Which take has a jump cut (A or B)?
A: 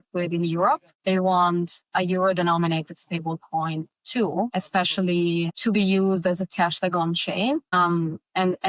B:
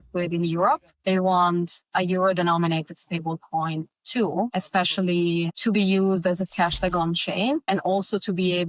B